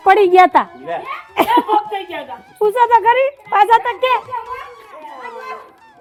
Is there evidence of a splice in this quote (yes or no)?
no